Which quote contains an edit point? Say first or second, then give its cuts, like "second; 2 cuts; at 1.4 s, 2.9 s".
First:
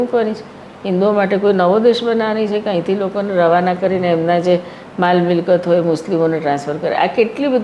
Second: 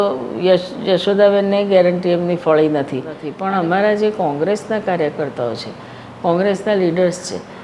second; 1 cut; at 3.3 s